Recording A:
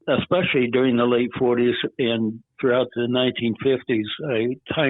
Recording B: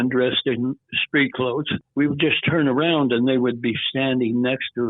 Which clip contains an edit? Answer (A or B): B